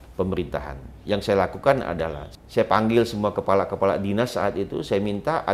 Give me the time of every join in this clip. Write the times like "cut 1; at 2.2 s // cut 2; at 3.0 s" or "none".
cut 1; at 2.2 s